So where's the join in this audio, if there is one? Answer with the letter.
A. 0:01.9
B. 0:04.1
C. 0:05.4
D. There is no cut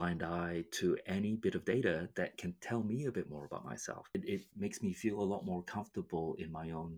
B